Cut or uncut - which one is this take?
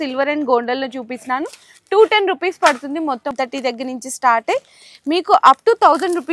cut